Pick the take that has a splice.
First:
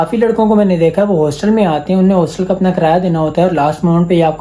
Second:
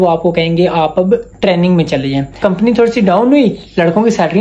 second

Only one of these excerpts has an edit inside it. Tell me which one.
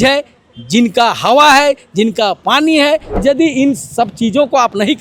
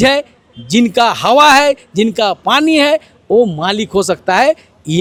first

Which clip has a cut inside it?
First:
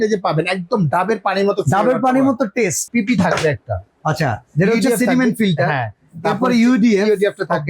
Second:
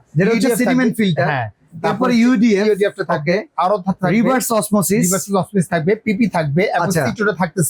first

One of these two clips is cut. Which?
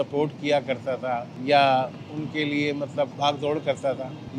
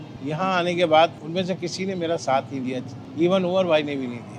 first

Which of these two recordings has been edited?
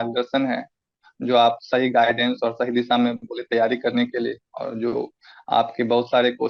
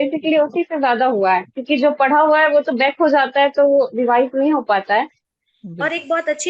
second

